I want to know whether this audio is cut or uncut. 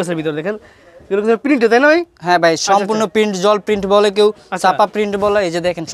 uncut